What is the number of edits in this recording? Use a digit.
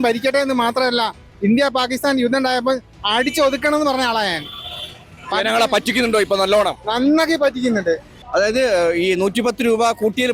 1